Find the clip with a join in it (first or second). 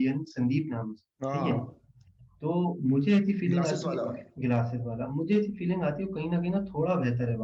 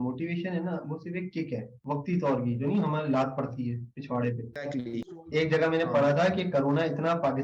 second